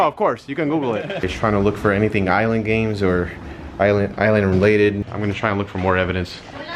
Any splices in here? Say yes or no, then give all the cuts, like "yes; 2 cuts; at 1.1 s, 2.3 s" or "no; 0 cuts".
yes; 2 cuts; at 1.3 s, 5.0 s